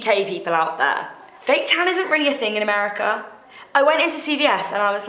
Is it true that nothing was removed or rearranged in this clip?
yes; 0 cuts

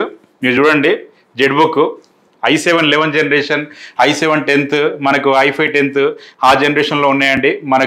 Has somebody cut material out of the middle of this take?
no; 0 cuts

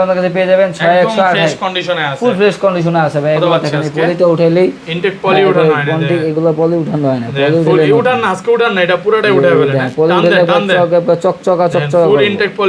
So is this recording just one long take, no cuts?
yes; 0 cuts

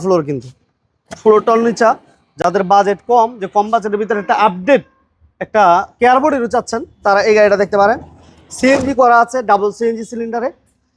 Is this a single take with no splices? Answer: yes; 0 cuts

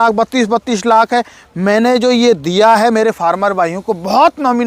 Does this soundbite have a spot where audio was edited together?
no; 0 cuts

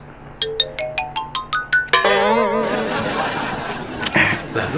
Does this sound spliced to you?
no; 0 cuts

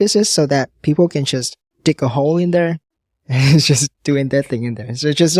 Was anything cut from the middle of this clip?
no; 0 cuts

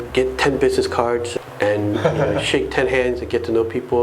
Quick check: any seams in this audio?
yes; 1 cut; at 1.3 s

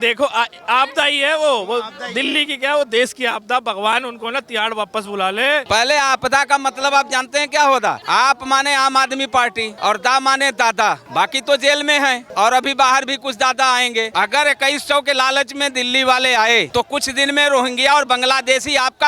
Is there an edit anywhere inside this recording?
yes; 7 cuts; at 5.6 s, 8.0 s, 9.7 s, 11.0 s, 12.2 s, 14.1 s, 16.7 s

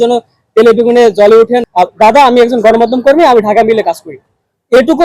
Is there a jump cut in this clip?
yes; 1 cut; at 1.6 s

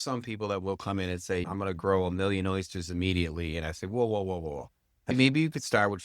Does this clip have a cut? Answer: yes; 2 cuts; at 1.5 s, 5.1 s

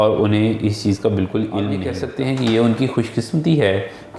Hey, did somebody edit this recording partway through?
yes; 1 cut; at 2.0 s

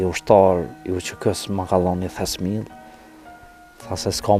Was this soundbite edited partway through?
no; 0 cuts

